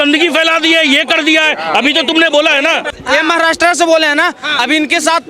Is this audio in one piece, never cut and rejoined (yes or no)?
no